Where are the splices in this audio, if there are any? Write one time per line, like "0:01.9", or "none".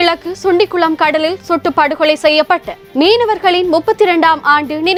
none